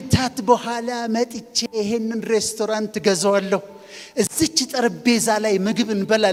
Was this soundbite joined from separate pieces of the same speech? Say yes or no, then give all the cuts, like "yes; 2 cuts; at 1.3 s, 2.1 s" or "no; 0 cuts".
no; 0 cuts